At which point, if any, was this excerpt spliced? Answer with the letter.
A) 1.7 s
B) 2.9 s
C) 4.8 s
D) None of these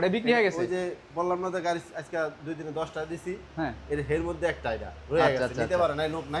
D